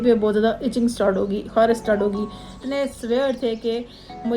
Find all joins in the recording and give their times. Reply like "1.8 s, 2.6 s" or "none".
2.5 s